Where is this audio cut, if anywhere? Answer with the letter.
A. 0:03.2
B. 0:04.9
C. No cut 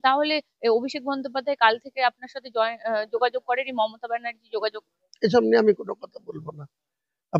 C